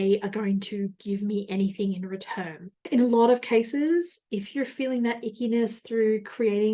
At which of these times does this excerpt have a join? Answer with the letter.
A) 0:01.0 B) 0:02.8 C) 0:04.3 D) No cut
B